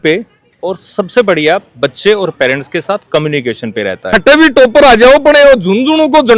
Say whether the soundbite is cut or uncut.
cut